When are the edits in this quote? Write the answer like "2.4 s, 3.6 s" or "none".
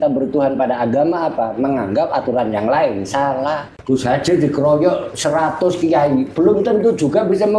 3.8 s